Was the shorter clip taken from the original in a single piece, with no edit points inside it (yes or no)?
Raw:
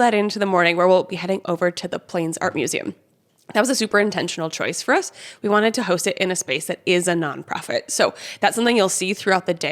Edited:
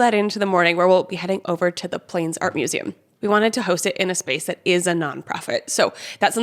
no